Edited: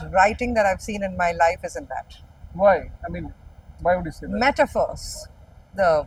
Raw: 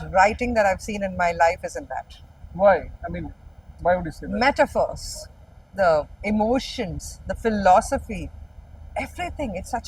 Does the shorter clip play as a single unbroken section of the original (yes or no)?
yes